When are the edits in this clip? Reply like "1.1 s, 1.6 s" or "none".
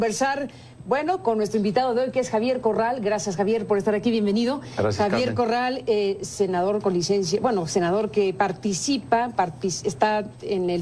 4.2 s